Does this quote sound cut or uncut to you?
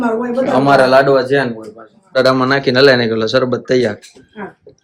cut